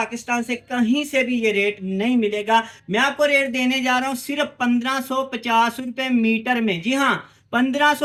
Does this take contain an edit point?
no; 0 cuts

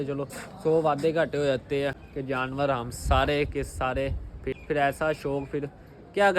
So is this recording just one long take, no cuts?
no; 2 cuts; at 2.1 s, 4.5 s

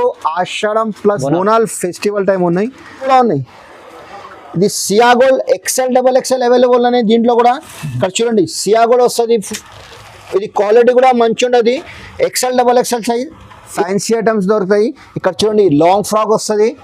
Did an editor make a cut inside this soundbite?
yes; 3 cuts; at 1.2 s, 3.1 s, 13.7 s

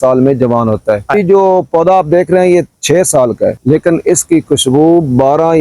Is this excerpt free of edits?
no; 2 cuts; at 1.1 s, 3.6 s

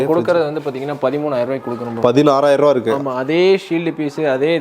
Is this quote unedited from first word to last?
yes; 0 cuts

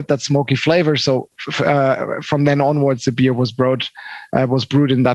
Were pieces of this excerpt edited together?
no; 0 cuts

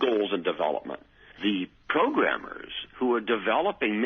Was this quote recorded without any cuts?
no; 1 cut; at 1.3 s

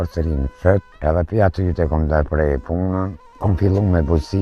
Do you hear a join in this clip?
yes; 2 cuts; at 0.9 s, 3.2 s

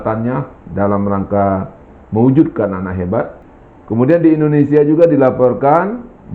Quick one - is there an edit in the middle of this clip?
yes; 1 cut; at 3.4 s

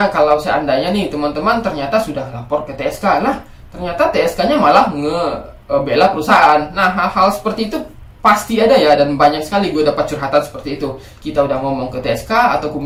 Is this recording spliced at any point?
no; 0 cuts

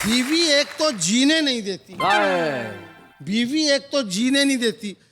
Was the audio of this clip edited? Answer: no; 0 cuts

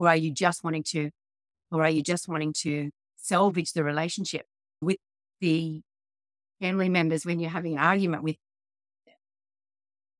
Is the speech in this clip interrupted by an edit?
no; 0 cuts

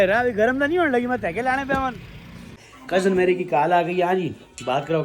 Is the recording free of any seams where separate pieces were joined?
no; 1 cut; at 2.7 s

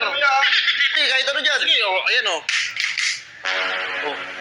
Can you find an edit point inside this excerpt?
yes; 1 cut; at 1.0 s

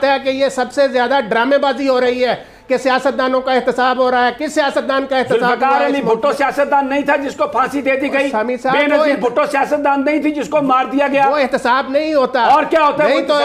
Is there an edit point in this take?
no; 0 cuts

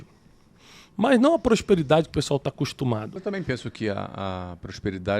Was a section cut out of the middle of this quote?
yes; 1 cut; at 3.1 s

